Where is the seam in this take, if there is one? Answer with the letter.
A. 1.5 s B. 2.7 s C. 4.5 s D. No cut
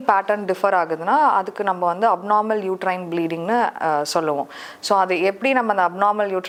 D